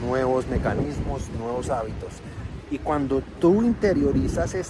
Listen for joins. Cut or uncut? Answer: uncut